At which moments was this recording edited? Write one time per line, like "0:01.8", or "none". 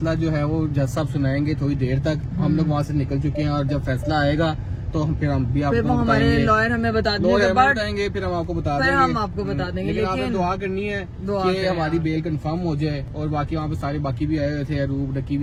none